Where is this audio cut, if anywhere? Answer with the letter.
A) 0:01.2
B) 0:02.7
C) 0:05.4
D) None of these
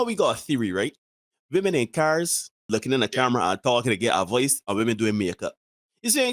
B